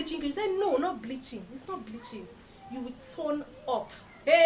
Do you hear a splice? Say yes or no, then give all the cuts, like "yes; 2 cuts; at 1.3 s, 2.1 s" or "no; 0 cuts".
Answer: no; 0 cuts